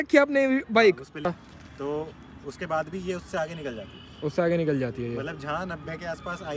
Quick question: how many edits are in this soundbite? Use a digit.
1